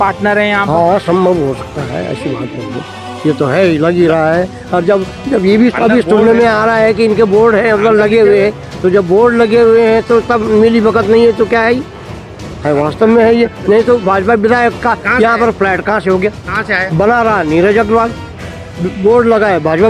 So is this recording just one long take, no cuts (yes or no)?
yes